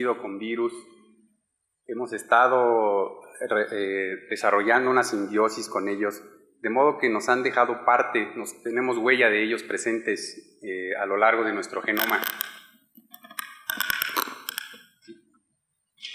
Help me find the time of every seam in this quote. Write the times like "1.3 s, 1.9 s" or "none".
1.9 s